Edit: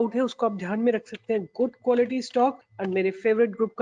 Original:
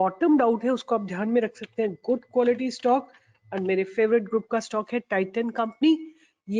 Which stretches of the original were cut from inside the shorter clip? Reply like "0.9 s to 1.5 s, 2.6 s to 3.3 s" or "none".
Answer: 3.2 s to 3.4 s